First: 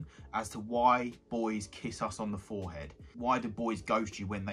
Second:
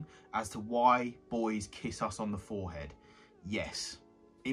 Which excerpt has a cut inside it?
first; 1 cut; at 3.1 s

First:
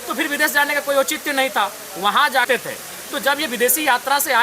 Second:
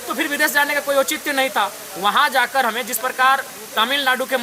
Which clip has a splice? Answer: first; 1 cut; at 2.5 s

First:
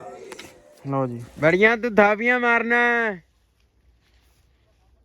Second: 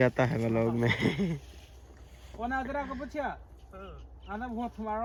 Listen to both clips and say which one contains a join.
first; 1 cut; at 1.3 s

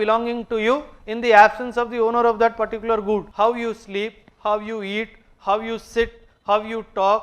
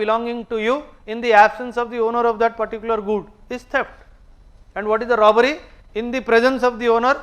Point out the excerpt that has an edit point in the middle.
first; 1 cut; at 3.3 s

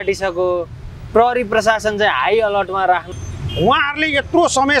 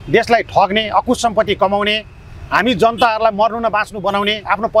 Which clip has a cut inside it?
first; 1 cut; at 3.1 s

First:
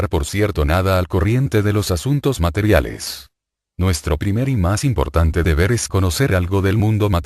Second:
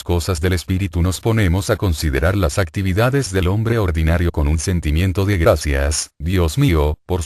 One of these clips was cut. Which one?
first; 1 cut; at 6.1 s

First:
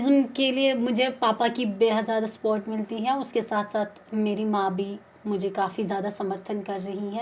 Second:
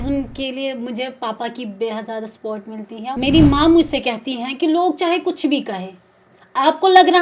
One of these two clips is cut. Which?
second; 1 cut; at 3.2 s

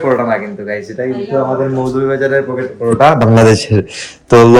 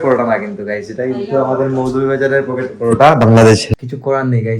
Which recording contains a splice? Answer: second; 1 cut; at 3.7 s

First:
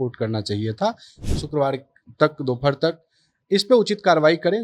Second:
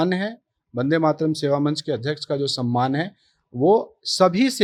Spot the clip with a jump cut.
first; 1 cut; at 1.2 s

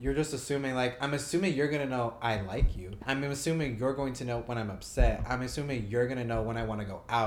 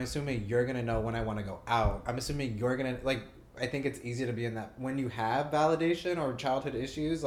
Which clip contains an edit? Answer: first; 1 cut; at 3.0 s

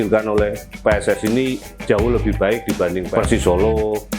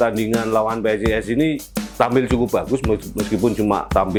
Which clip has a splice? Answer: first; 1 cut; at 3.1 s

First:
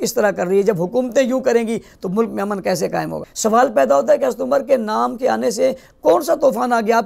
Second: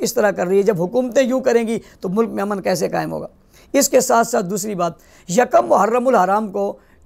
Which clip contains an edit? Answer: first; 1 cut; at 3.2 s

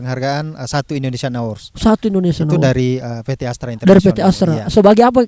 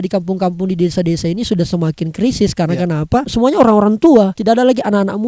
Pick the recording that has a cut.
second; 2 cuts; at 3.3 s, 4.4 s

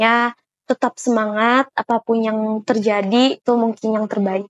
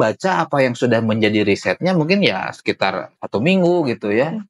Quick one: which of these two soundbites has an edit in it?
first; 1 cut; at 3.4 s

